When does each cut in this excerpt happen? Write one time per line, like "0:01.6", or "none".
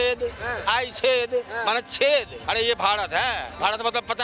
0:02.4